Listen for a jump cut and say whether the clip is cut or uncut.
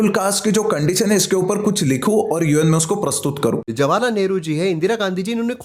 cut